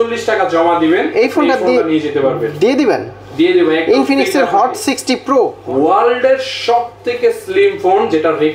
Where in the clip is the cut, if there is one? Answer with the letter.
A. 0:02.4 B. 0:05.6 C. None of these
B